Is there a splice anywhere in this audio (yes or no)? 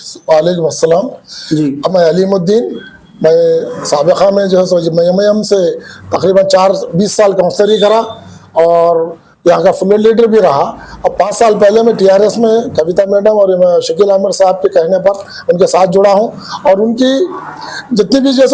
no